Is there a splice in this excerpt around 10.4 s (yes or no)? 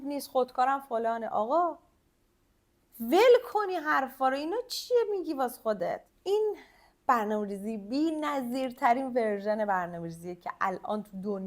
no